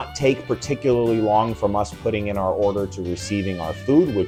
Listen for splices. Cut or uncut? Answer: uncut